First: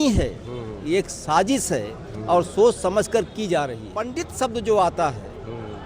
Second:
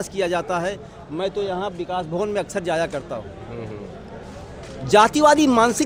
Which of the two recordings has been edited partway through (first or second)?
first